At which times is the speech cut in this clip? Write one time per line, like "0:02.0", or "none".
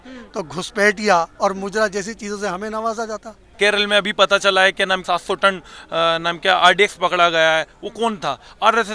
0:03.5
0:05.0